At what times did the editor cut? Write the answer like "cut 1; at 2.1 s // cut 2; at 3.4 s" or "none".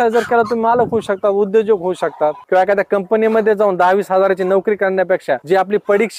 cut 1; at 2.4 s